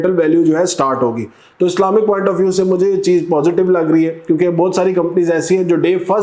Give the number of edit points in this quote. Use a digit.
0